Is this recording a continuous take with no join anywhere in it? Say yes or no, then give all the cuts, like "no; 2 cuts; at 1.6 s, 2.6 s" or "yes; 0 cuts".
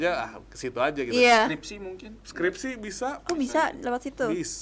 yes; 0 cuts